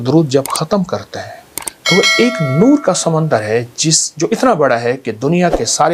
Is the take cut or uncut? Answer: uncut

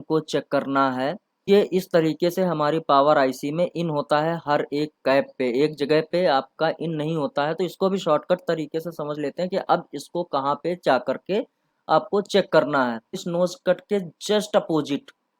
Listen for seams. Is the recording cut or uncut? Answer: cut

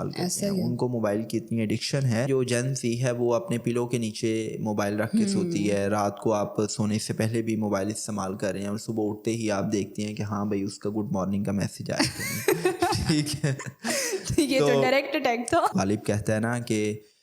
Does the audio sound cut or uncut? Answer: cut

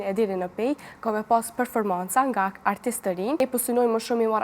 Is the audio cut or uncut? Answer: cut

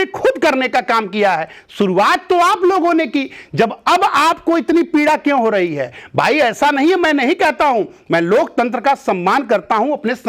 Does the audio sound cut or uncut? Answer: uncut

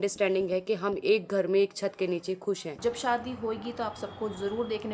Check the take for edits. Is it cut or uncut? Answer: cut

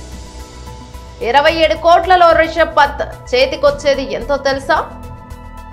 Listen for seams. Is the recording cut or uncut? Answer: uncut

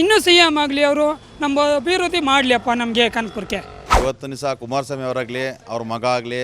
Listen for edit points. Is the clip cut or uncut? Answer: cut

